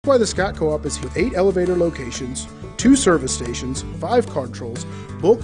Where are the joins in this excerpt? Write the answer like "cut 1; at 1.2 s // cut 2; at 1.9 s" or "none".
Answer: cut 1; at 1.0 s